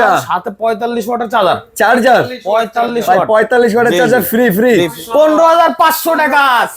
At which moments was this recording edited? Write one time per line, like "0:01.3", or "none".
0:05.0